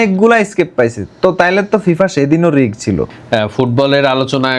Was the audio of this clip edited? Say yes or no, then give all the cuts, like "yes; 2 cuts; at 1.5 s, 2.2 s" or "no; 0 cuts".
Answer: yes; 1 cut; at 3.2 s